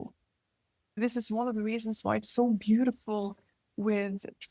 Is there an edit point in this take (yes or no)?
yes